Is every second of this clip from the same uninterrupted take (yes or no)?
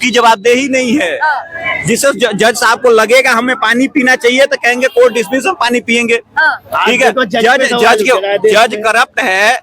yes